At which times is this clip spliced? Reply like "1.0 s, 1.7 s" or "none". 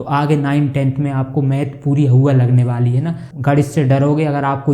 3.3 s